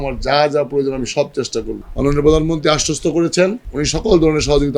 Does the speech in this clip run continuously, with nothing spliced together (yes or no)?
no